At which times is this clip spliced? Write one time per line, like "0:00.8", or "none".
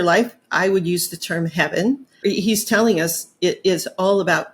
0:02.2